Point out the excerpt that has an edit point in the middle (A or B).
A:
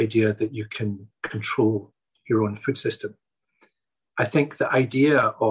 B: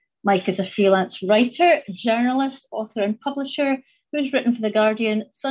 A